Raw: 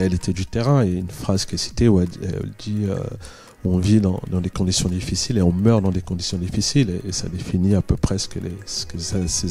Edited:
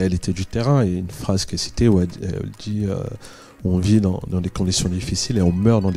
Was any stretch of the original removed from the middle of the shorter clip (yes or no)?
no